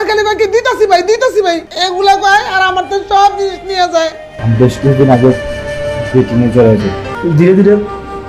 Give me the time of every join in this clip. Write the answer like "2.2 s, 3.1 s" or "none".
1.7 s, 4.3 s, 7.1 s